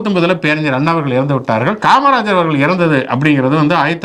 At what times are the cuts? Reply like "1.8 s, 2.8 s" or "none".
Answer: 1.8 s

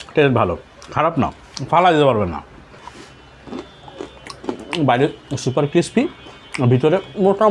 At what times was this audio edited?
2.7 s

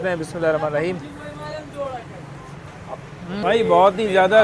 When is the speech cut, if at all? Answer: 3.4 s

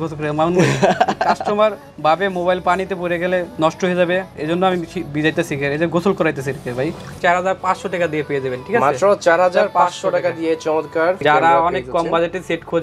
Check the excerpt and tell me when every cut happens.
3.5 s, 7.1 s, 11.2 s

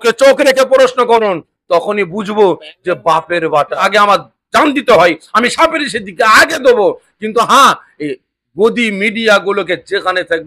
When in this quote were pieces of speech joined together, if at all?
3.8 s

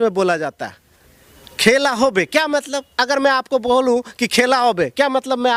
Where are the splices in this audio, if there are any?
none

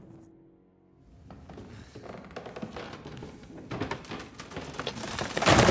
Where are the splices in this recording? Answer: none

